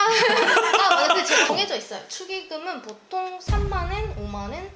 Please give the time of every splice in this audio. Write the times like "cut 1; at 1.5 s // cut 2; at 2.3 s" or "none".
cut 1; at 1.5 s